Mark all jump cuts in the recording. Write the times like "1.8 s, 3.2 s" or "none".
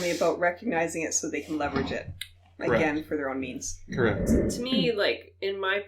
4.2 s